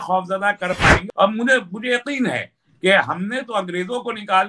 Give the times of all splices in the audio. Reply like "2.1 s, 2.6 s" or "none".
1.0 s

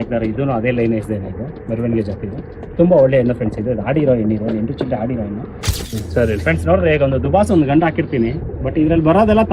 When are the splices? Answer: 5.9 s

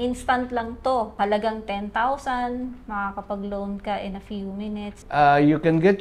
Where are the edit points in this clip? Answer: 1.1 s, 5.0 s

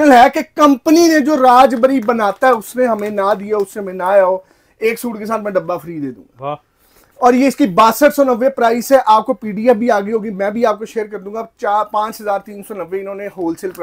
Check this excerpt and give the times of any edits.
none

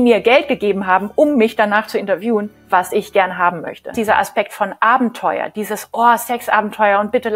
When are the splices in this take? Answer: 3.9 s

